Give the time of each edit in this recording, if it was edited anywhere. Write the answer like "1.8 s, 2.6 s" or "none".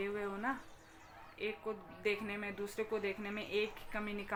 none